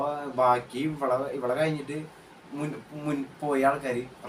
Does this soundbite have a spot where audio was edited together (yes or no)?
no